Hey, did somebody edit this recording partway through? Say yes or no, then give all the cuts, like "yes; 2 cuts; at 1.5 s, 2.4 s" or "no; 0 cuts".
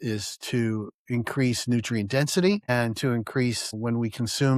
no; 0 cuts